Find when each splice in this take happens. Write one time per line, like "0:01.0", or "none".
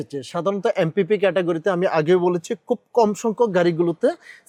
none